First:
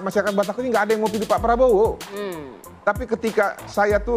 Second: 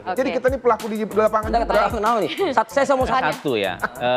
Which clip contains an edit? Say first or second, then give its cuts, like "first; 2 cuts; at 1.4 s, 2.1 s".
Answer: second; 1 cut; at 3.1 s